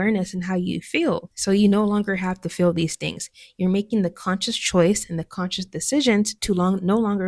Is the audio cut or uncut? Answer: uncut